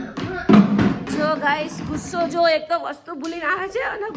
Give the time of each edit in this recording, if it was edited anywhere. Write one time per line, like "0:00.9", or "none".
none